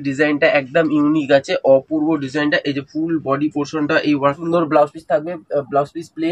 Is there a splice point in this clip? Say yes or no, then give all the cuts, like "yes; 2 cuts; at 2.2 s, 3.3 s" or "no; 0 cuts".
yes; 1 cut; at 4.4 s